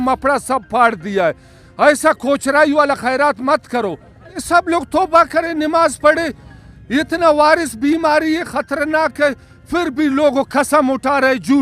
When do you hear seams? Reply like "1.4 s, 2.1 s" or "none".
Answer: 4.4 s